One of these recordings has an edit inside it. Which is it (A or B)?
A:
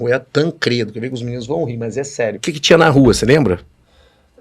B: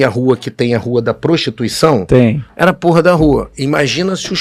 A